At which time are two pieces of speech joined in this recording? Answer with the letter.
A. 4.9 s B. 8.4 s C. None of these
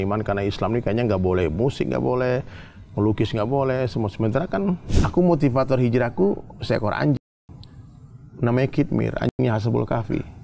A